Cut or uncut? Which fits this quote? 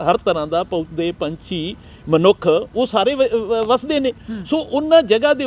uncut